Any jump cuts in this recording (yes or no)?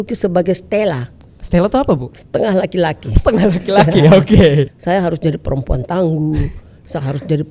yes